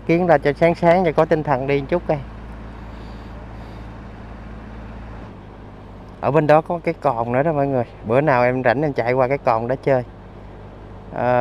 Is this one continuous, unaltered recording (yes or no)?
no